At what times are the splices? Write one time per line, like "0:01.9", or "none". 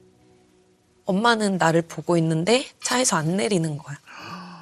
none